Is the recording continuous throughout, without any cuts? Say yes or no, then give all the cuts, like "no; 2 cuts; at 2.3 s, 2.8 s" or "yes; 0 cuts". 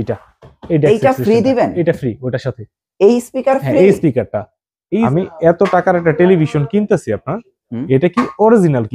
no; 1 cut; at 5.1 s